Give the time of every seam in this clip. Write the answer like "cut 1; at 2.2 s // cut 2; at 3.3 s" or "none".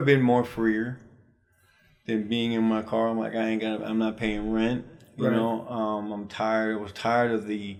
none